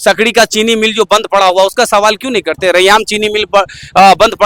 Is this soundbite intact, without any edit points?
yes; 0 cuts

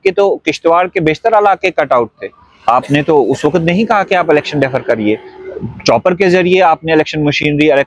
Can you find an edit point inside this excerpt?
no; 0 cuts

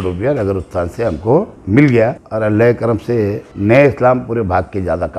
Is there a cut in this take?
yes; 3 cuts; at 1.6 s, 2.2 s, 3.5 s

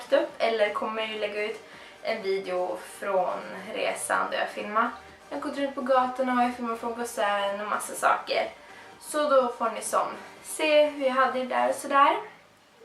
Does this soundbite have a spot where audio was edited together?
no; 0 cuts

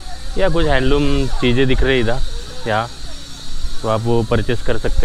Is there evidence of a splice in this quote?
no; 0 cuts

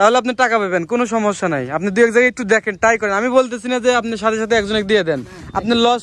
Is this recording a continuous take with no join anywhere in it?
yes; 0 cuts

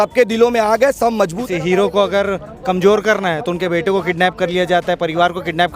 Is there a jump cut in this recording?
yes; 1 cut; at 1.4 s

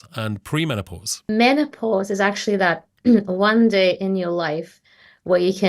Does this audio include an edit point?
yes; 1 cut; at 1.3 s

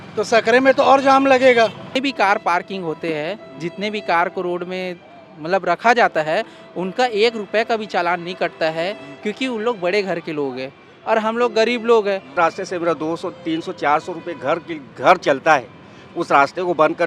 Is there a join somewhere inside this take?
yes; 2 cuts; at 1.9 s, 12.3 s

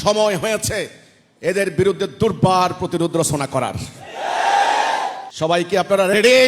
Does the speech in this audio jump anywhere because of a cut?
yes; 1 cut; at 5.2 s

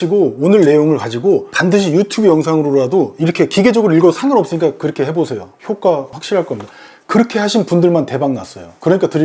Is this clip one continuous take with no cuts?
yes; 0 cuts

